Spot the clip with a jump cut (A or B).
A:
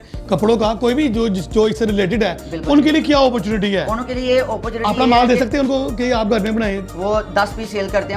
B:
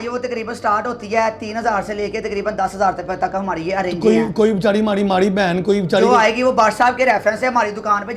A